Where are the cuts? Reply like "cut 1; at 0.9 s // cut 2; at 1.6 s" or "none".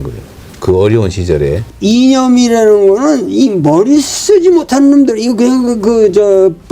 cut 1; at 1.7 s